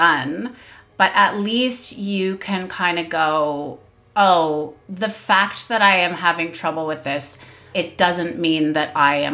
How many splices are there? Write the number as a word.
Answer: two